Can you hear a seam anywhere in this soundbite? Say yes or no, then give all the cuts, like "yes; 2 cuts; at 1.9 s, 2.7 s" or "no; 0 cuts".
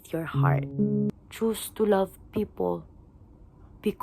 yes; 1 cut; at 1.1 s